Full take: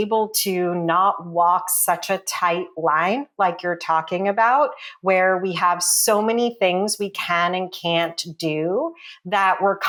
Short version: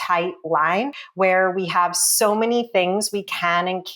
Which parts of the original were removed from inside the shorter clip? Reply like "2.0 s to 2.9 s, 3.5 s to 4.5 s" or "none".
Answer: 3.3 s to 4.8 s